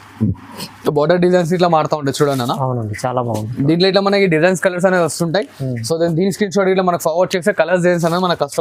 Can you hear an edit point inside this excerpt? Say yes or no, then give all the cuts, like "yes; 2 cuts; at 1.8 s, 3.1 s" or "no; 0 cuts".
no; 0 cuts